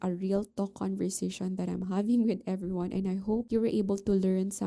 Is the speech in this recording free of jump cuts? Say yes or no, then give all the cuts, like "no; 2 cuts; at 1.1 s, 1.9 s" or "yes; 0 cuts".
no; 1 cut; at 3.5 s